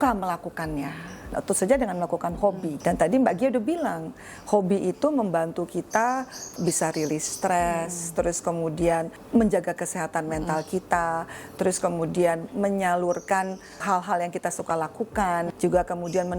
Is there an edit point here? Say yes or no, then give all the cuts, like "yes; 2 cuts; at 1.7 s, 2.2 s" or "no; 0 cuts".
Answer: yes; 6 cuts; at 1.3 s, 2.7 s, 6.6 s, 9.2 s, 13.8 s, 15.5 s